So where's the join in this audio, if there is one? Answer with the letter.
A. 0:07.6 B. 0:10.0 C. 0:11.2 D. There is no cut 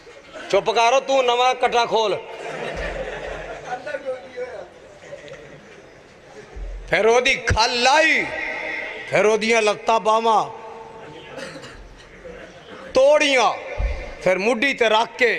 A